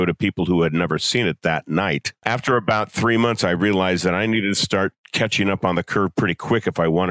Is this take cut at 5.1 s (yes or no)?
no